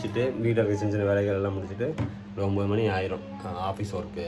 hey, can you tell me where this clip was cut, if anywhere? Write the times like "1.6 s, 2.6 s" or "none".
none